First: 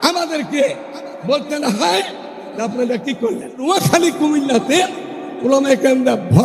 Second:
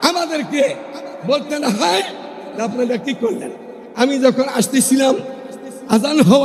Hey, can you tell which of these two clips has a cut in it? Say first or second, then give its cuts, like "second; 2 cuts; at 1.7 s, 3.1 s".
first; 1 cut; at 3.7 s